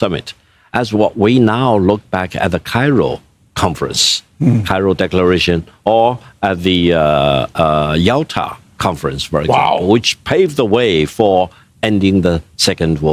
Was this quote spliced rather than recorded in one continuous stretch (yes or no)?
no